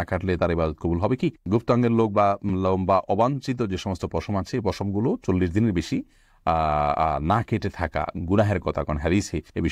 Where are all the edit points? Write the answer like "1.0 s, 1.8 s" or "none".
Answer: none